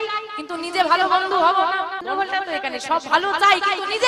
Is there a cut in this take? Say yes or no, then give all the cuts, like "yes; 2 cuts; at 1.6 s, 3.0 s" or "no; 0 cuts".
yes; 1 cut; at 2.0 s